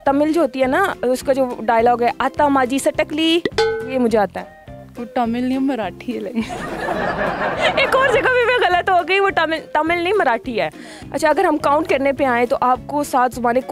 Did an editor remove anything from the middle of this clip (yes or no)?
no